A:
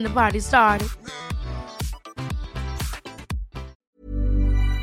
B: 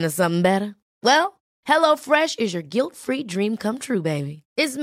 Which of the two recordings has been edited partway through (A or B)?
A